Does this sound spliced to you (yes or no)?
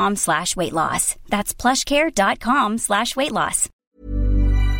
yes